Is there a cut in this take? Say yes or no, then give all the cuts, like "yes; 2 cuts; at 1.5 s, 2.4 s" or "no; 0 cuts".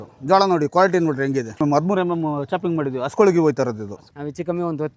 yes; 2 cuts; at 1.5 s, 4.0 s